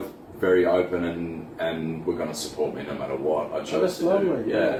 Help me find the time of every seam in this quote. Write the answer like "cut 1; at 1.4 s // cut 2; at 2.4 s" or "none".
none